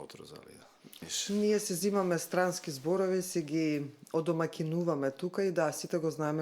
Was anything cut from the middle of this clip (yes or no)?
yes